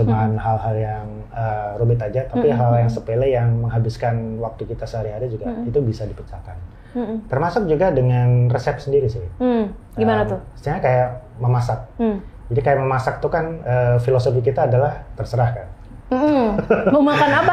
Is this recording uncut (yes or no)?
yes